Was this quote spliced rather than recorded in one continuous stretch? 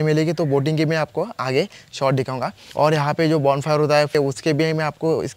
no; 0 cuts

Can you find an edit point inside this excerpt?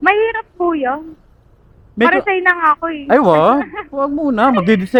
no; 0 cuts

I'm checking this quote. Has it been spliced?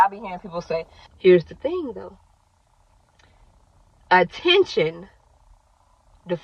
yes; 1 cut; at 1.0 s

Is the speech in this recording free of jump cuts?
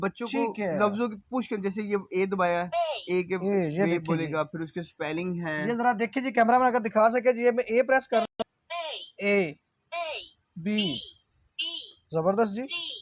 yes; 0 cuts

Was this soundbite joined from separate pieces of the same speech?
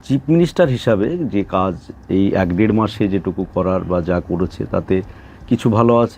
no; 0 cuts

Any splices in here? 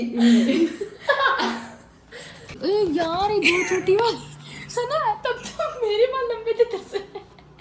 yes; 1 cut; at 2.5 s

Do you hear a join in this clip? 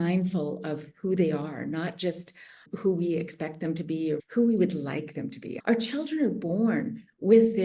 yes; 1 cut; at 5.5 s

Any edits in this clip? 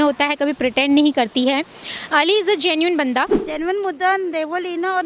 yes; 1 cut; at 3.4 s

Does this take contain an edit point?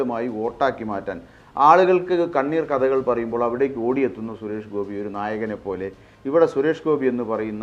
yes; 1 cut; at 6.1 s

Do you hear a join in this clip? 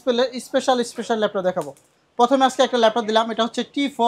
no; 0 cuts

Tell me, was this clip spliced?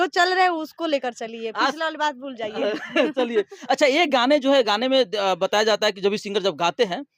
no; 0 cuts

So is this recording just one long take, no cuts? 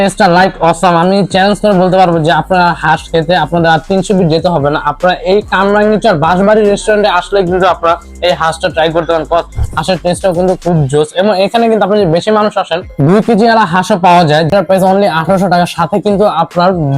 yes; 0 cuts

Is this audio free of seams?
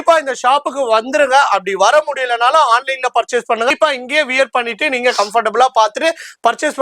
no; 1 cut; at 3.7 s

